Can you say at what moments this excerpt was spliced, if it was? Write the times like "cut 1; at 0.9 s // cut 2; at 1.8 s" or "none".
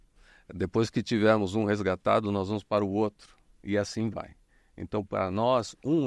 none

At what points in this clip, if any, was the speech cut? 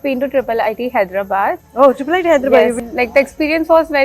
cut 1; at 2.8 s

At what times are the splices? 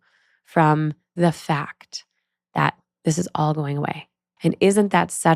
cut 1; at 1.1 s // cut 2; at 2.8 s // cut 3; at 4.3 s

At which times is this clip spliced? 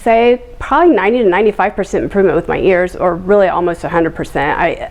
none

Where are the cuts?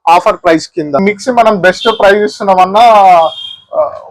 cut 1; at 1.0 s

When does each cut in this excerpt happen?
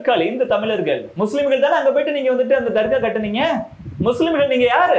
cut 1; at 1.1 s

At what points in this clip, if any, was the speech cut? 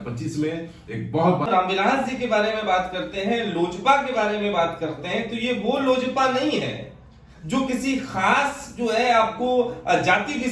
cut 1; at 1.5 s

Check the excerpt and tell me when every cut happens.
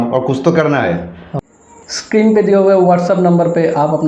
cut 1; at 1.4 s

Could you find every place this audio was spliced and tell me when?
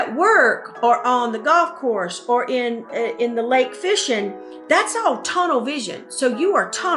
none

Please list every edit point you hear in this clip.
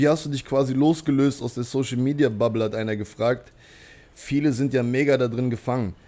none

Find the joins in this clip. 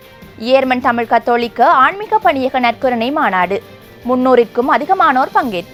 none

